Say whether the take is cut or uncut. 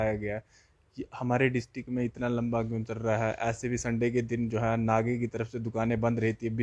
uncut